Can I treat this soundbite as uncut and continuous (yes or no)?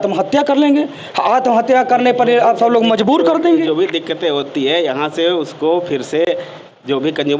yes